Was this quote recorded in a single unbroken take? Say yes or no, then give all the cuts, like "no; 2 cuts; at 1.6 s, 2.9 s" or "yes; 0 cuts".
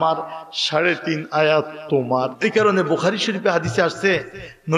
no; 1 cut; at 2.3 s